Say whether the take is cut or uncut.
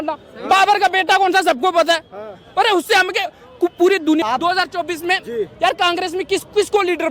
cut